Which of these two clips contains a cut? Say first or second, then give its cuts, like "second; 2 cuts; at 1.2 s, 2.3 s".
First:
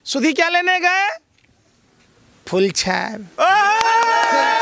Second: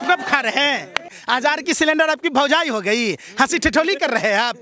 second; 1 cut; at 1.2 s